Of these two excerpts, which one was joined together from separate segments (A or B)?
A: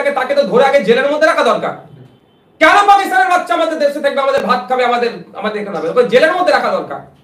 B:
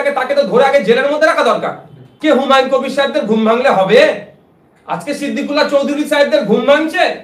B